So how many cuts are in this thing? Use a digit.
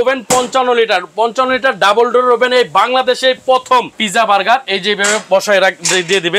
1